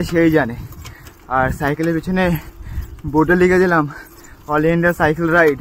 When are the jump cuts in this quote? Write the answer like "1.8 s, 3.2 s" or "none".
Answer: none